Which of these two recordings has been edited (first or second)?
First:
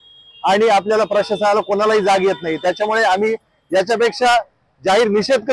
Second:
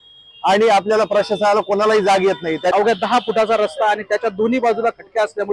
second